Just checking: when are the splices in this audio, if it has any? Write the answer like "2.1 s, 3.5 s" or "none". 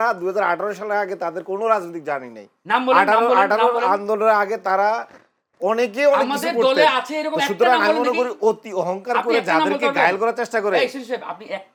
none